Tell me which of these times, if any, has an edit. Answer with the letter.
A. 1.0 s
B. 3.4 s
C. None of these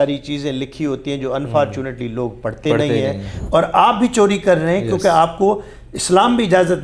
B